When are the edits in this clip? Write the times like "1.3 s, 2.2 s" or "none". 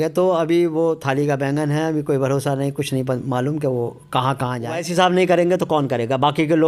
4.8 s